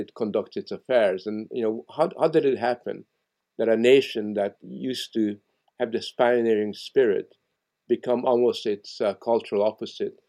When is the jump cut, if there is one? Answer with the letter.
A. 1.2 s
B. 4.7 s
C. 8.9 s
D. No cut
D